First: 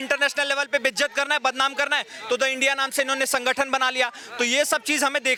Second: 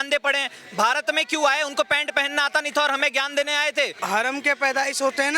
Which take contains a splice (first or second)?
second